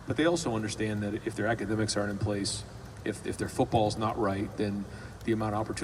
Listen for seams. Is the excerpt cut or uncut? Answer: uncut